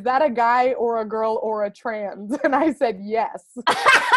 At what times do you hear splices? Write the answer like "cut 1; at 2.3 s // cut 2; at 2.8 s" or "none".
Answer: none